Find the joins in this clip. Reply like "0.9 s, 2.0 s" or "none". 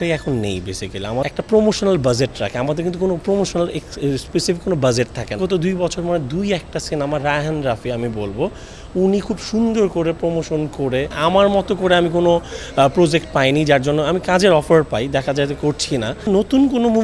1.3 s, 5.4 s, 11.1 s, 16.3 s